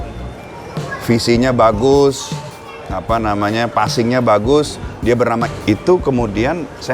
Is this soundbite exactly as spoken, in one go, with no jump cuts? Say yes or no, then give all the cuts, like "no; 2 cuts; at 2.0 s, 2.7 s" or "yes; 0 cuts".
no; 1 cut; at 5.5 s